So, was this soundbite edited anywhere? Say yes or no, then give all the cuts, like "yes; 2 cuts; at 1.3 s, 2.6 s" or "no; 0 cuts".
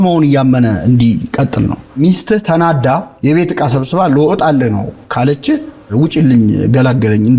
yes; 2 cuts; at 2.0 s, 3.1 s